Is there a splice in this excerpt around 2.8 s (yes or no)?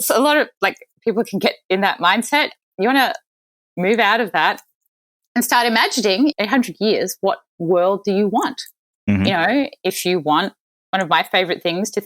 no